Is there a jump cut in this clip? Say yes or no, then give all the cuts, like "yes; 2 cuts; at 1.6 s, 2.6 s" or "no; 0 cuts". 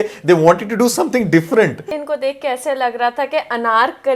yes; 1 cut; at 1.9 s